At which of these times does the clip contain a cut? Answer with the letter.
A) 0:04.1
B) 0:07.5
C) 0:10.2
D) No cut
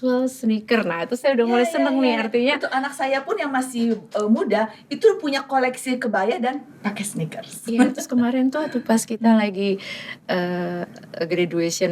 D